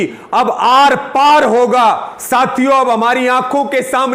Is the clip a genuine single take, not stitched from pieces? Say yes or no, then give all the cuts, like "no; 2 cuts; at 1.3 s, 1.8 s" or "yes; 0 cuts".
no; 1 cut; at 2.1 s